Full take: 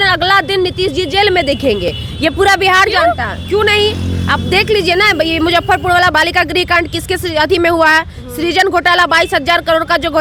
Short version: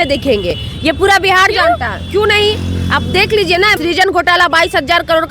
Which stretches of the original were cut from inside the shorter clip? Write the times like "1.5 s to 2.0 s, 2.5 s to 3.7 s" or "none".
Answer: 5.1 s to 8.3 s